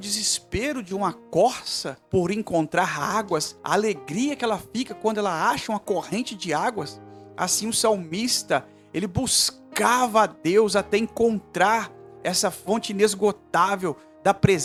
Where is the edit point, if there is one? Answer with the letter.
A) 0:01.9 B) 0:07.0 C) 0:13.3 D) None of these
D